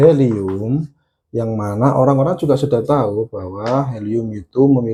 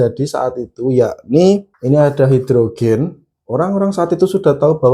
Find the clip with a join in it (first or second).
second